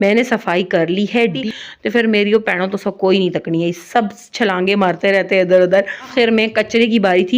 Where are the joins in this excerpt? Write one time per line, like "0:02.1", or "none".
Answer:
0:01.4
0:06.0